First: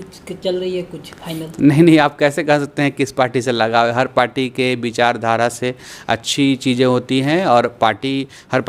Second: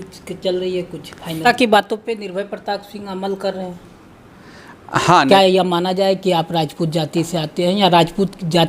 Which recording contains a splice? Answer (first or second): second